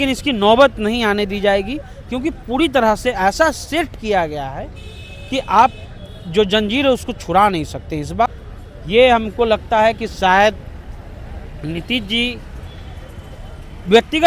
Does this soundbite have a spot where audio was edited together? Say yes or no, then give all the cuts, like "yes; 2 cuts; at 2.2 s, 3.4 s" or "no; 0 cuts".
yes; 1 cut; at 8.3 s